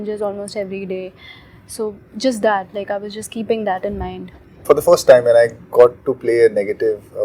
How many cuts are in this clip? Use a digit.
1